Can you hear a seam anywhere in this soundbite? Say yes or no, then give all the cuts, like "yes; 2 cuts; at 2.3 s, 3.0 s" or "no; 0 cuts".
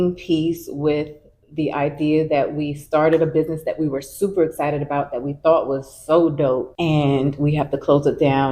no; 0 cuts